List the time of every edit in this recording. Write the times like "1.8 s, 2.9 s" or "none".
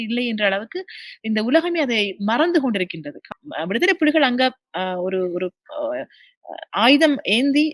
3.3 s